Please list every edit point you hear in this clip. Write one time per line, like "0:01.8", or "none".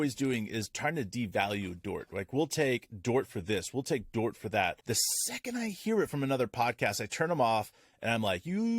0:04.8